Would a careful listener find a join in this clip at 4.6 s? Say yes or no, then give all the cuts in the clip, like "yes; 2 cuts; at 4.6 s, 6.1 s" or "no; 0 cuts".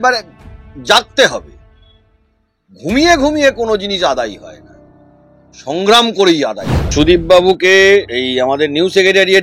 no; 2 cuts; at 6.9 s, 8.1 s